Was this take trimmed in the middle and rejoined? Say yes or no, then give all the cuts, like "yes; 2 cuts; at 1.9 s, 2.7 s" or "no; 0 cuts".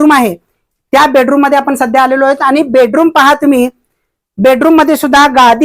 no; 0 cuts